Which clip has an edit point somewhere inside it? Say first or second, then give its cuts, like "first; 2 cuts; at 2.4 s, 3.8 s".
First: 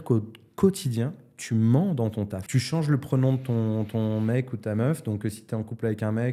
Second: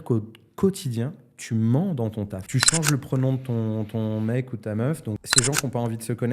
second; 1 cut; at 5.2 s